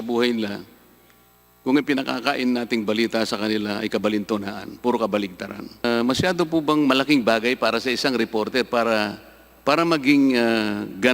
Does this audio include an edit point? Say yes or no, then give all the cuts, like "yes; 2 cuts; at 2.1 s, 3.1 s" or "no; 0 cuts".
yes; 1 cut; at 5.6 s